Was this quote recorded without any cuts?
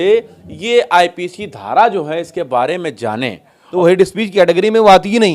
no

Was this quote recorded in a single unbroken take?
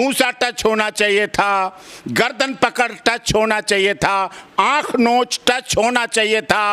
yes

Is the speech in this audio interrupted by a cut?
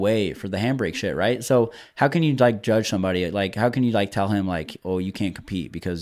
no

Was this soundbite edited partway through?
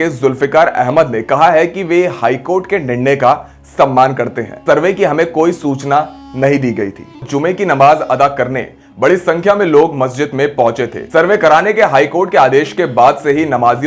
yes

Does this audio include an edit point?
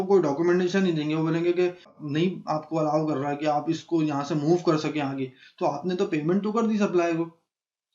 yes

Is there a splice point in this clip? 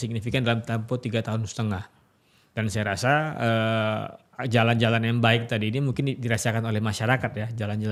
no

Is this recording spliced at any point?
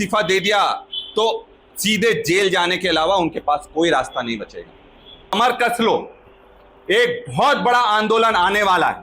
yes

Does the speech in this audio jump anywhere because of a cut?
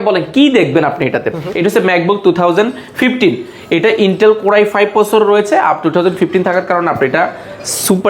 yes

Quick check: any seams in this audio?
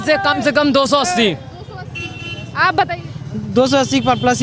no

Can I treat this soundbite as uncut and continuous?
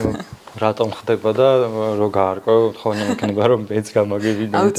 yes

